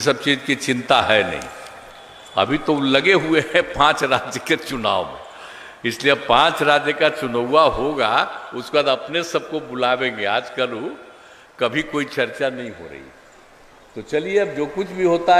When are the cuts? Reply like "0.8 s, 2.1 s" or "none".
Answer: none

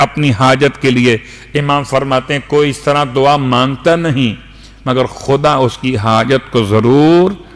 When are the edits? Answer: none

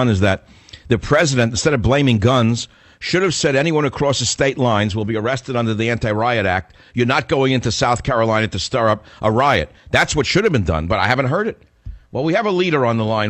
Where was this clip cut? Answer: 5.1 s

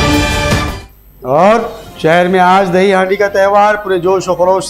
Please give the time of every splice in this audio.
0.9 s

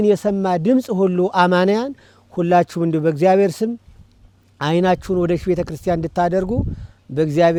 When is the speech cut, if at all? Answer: none

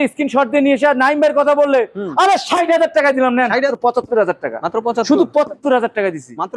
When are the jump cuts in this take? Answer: 3.7 s

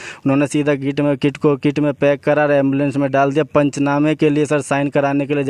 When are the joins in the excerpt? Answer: none

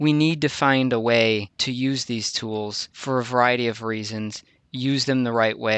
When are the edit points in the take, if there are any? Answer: 1.6 s, 2.9 s

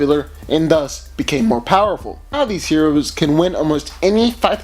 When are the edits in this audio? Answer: 2.6 s

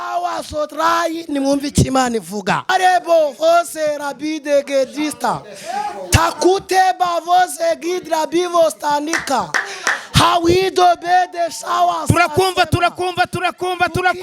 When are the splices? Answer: 2.7 s

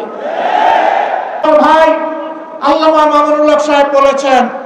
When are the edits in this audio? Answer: 1.5 s

